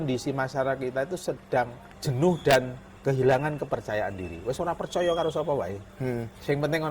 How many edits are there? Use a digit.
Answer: 2